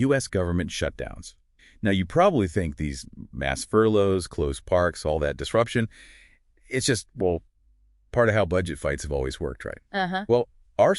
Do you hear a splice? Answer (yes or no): yes